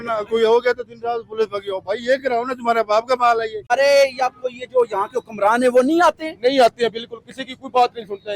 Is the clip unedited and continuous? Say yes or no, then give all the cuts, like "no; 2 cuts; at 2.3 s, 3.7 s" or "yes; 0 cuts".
no; 1 cut; at 3.7 s